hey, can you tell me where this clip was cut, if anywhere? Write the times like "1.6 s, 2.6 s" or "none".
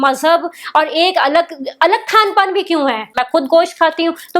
3.2 s

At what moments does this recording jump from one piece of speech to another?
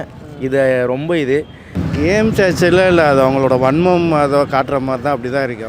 1.8 s

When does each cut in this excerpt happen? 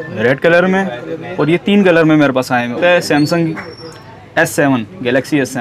2.8 s

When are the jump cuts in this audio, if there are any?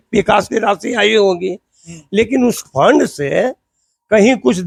none

